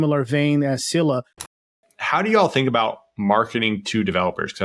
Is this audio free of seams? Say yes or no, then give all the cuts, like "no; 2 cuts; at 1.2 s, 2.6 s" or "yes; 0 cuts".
no; 1 cut; at 1.7 s